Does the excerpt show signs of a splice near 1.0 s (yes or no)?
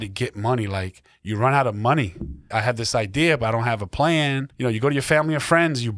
no